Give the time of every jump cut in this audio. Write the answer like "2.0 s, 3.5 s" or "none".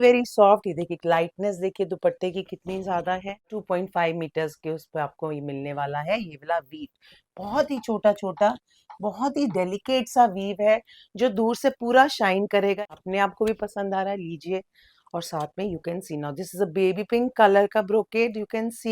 3.6 s, 12.8 s